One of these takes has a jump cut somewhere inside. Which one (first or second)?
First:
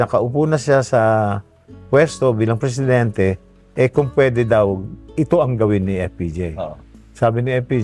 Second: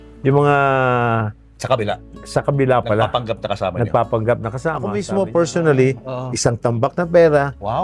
second